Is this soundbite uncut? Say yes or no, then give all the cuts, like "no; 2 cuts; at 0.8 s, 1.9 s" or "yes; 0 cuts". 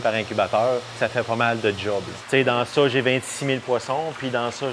no; 2 cuts; at 1.0 s, 2.1 s